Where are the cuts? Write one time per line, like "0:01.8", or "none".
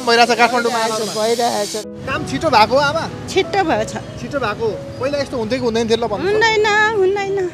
0:01.8